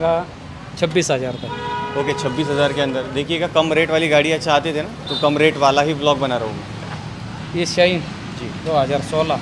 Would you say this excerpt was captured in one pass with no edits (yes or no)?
yes